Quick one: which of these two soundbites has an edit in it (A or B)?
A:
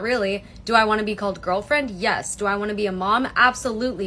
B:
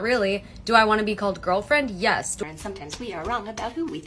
B